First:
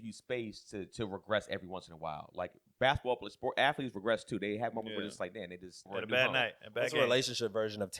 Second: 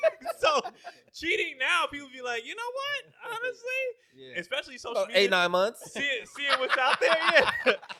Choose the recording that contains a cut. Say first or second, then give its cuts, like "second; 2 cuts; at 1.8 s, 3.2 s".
first; 1 cut; at 5.9 s